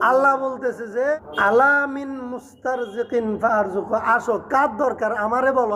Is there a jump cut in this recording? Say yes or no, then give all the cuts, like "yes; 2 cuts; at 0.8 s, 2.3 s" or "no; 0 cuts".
yes; 1 cut; at 1.3 s